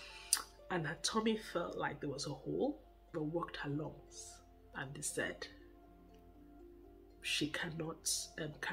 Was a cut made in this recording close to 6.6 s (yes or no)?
no